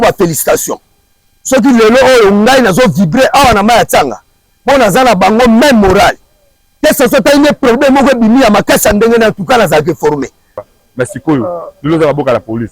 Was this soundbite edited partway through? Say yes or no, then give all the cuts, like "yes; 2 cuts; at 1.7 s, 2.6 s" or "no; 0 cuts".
yes; 1 cut; at 10.6 s